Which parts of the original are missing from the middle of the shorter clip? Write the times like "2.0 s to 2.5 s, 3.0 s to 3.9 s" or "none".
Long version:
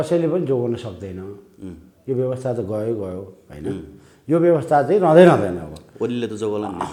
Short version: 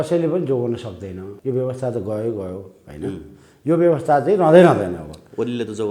1.2 s to 1.9 s

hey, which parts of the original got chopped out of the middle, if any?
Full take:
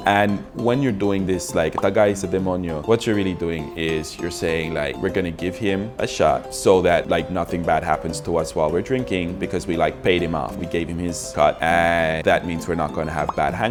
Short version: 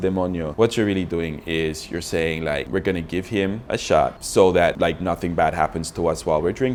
none

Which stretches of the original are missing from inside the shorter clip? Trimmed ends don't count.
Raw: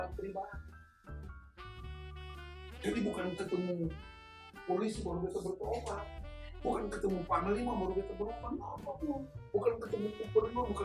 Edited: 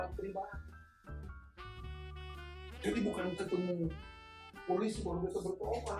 none

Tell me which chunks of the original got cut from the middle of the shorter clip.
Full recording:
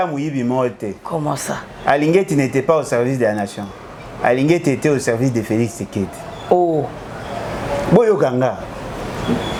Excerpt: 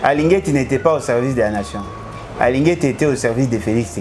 none

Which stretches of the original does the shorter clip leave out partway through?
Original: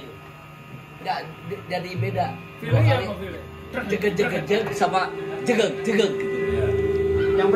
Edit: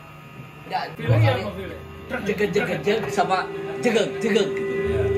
1.3 s to 2.6 s

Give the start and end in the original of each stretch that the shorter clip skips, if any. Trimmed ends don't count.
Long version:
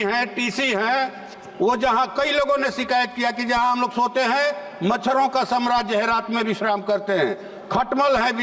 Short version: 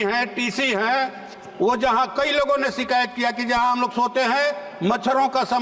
none

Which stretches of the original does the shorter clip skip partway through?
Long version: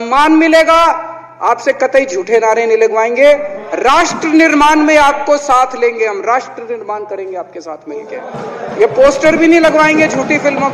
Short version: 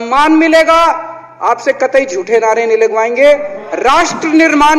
none

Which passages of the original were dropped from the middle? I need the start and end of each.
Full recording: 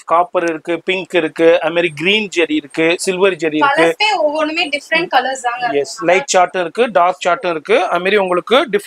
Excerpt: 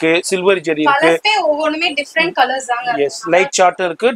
none

